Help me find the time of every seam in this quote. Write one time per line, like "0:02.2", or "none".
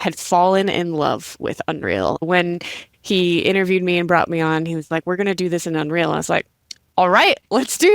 0:02.2